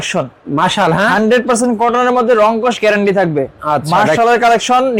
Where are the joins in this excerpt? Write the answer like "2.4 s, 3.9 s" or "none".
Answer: none